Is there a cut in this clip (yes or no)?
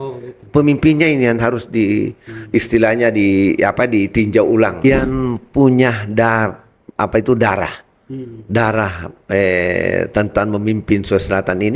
yes